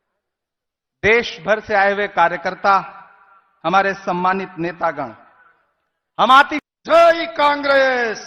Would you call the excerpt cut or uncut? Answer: cut